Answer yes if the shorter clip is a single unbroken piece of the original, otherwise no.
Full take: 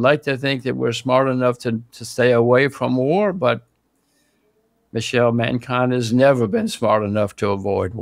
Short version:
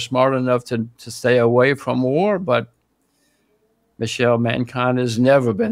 yes